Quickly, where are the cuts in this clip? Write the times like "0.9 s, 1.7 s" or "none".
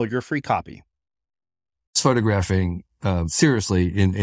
2.0 s